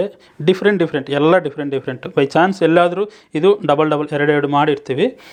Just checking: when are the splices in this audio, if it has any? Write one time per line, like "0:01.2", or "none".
none